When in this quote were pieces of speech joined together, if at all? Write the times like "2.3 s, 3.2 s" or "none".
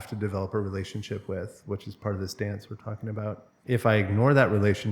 3.5 s

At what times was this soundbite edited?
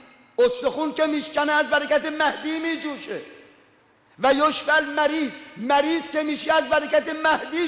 4.0 s

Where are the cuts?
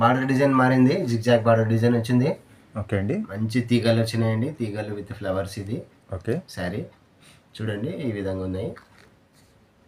none

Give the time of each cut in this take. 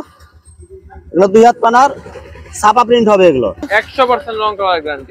3.7 s

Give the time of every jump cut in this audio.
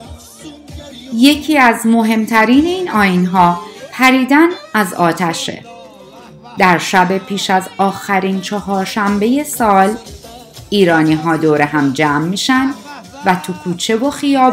1.1 s

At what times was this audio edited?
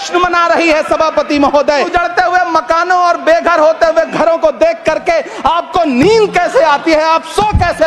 1.9 s

